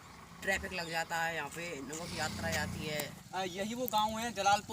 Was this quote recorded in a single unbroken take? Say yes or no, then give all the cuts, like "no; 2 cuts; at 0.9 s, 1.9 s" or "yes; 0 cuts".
no; 1 cut; at 3.2 s